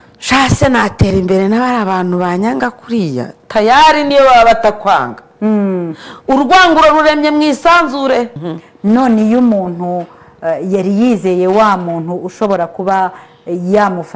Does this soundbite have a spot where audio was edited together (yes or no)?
yes